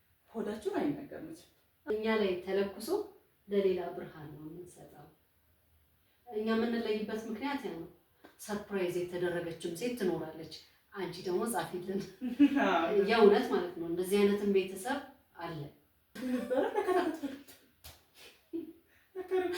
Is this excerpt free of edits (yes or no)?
no